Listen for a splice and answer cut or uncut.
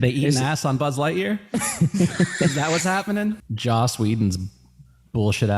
cut